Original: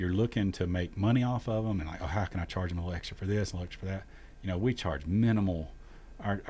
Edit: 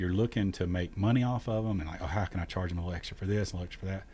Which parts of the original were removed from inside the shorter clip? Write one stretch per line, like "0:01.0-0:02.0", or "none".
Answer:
none